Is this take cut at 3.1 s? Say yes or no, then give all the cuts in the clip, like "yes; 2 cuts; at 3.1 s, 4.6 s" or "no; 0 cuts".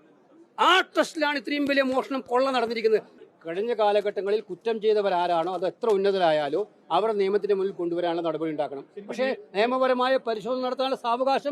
yes; 1 cut; at 3.1 s